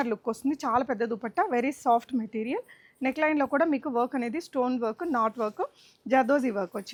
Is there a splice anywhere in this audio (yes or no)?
no